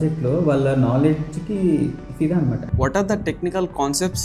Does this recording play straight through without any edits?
no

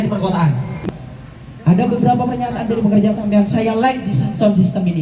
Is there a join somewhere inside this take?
yes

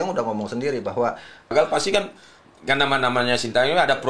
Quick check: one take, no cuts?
no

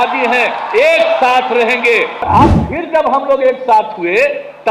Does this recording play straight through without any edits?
no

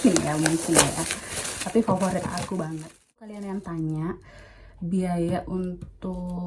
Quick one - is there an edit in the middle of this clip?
yes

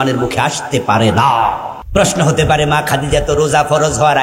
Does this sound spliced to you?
yes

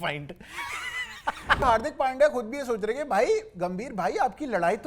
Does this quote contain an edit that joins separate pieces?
yes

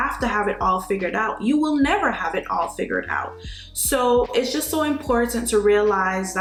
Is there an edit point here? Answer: no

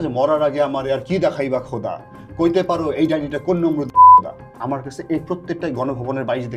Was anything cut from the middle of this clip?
yes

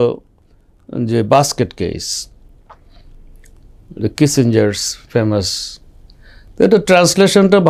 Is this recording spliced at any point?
no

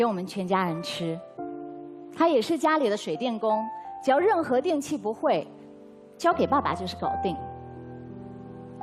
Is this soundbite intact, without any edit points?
no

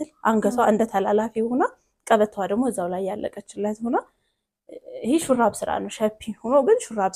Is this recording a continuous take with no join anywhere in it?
yes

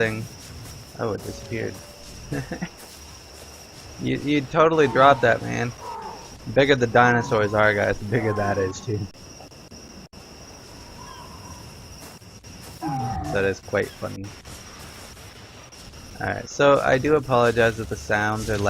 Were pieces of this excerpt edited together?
yes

